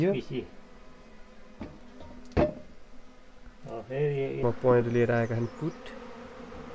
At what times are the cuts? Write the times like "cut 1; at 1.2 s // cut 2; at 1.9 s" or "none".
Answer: cut 1; at 4.4 s